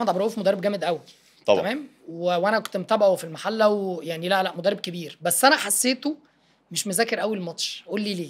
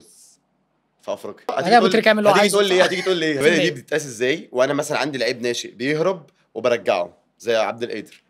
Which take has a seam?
second; 2 cuts; at 1.5 s, 3.4 s

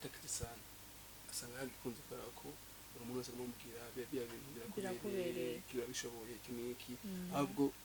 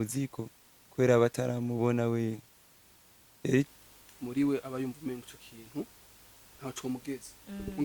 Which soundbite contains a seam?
second; 1 cut; at 3.7 s

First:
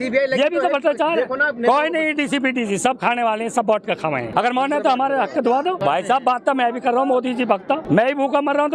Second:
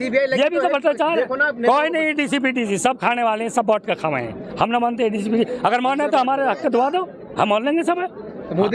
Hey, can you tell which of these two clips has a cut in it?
first; 3 cuts; at 4.3 s, 5.8 s, 7.8 s

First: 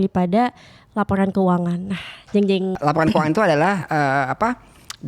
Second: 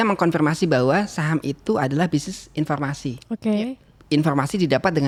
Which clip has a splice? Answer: first; 1 cut; at 2.8 s

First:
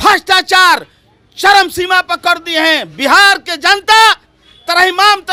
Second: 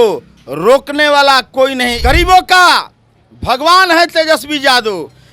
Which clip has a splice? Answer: second; 1 cut; at 1.9 s

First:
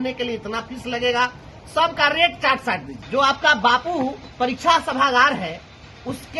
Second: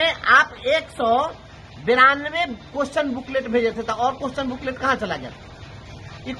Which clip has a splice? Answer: first; 1 cut; at 2.9 s

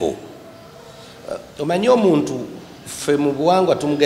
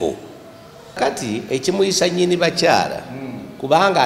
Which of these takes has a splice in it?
second; 1 cut; at 1.0 s

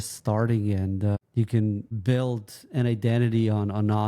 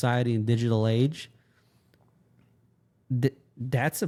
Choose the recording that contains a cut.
first; 2 cuts; at 1.2 s, 1.9 s

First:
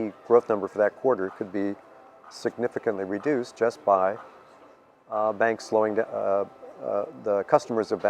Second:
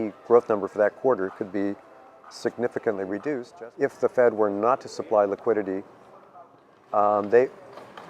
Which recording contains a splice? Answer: second; 1 cut; at 3.5 s

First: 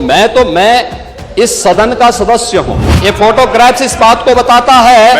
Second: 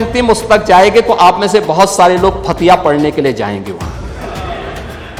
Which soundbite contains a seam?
first; 1 cut; at 2.8 s

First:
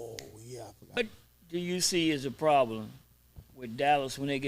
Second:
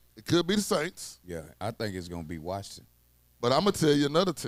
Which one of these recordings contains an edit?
first; 1 cut; at 1.0 s

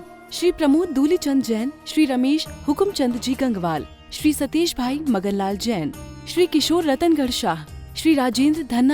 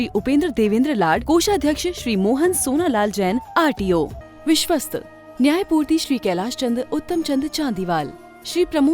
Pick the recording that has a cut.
second; 1 cut; at 4.2 s

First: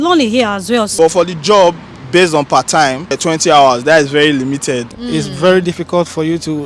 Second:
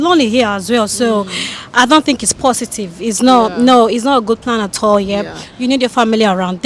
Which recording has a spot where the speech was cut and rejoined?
first; 3 cuts; at 0.9 s, 3.2 s, 4.9 s

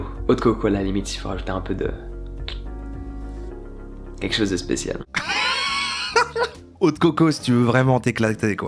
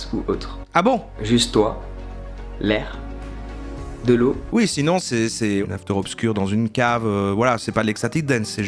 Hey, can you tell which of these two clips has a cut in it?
second; 2 cuts; at 1.1 s, 5.6 s

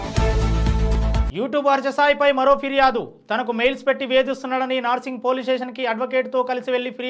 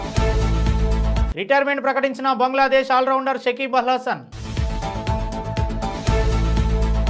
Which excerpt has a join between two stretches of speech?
first; 1 cut; at 1.0 s

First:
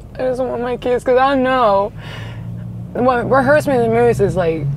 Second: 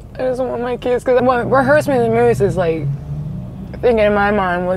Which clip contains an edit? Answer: second; 1 cut; at 1.2 s

